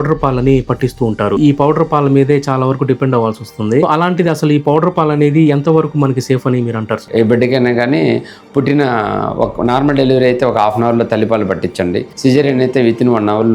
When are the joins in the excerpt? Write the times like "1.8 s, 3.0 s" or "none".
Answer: 7.0 s

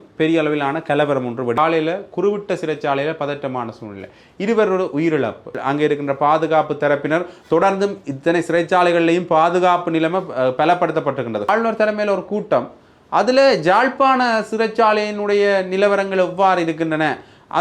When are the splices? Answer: 1.6 s, 5.6 s, 11.5 s

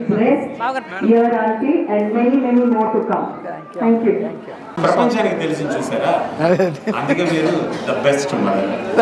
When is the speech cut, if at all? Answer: none

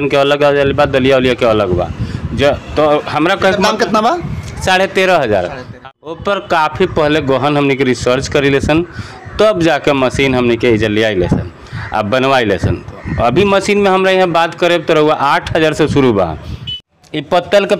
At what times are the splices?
5.9 s, 16.7 s

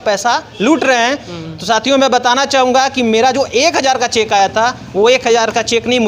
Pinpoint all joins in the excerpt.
none

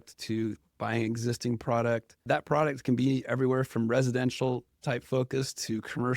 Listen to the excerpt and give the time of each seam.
2.2 s

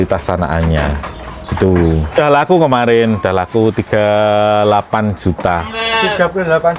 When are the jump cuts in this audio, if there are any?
2.2 s

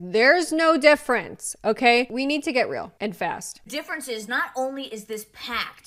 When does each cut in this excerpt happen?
none

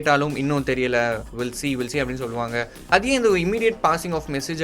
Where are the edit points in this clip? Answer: 2.8 s

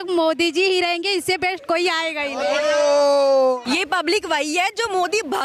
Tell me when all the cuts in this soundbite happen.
3.6 s

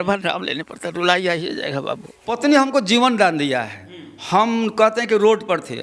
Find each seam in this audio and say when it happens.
2.4 s

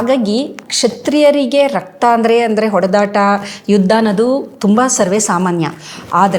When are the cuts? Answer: none

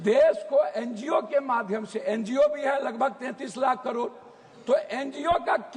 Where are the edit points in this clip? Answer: none

